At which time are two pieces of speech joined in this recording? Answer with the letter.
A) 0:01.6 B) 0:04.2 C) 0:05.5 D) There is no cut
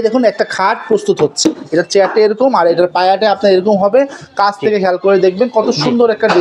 A